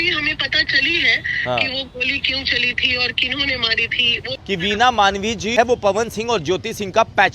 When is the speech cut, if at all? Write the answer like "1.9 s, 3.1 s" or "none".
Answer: 4.3 s, 5.5 s